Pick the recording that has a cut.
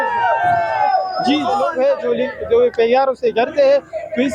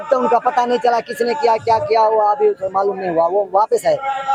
first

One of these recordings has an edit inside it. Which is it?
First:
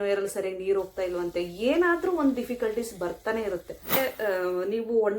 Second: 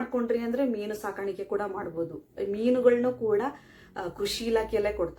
first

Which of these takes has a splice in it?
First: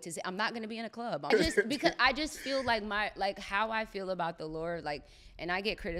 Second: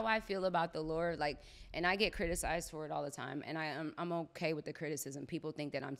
first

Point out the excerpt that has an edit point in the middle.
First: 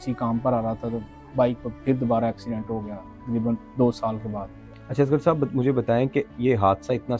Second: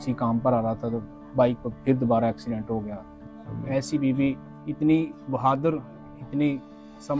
second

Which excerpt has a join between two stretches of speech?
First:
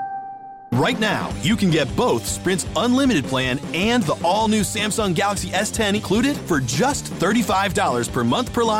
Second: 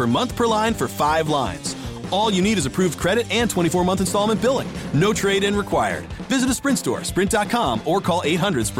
first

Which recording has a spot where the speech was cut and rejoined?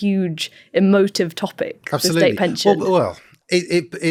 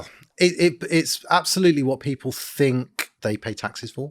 second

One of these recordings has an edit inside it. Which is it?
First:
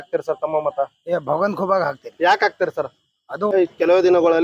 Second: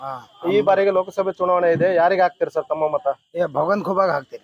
first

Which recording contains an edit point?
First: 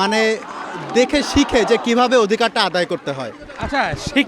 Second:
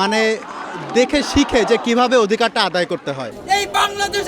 second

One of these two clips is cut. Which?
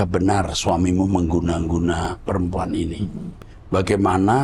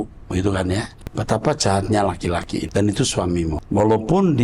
second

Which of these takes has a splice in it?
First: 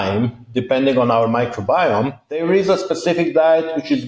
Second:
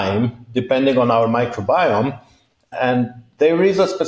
first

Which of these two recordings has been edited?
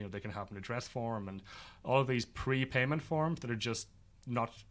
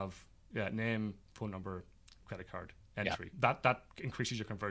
second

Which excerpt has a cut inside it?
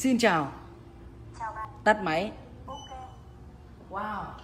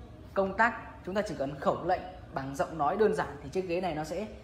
first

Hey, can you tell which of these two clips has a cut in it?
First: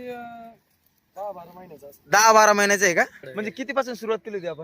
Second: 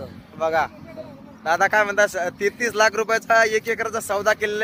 first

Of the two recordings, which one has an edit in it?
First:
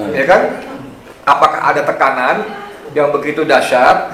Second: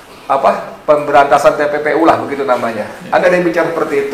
second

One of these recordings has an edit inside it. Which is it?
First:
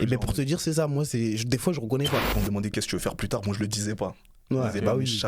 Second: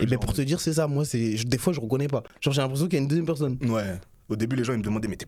first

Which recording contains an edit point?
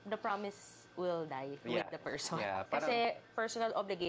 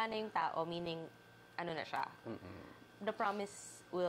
first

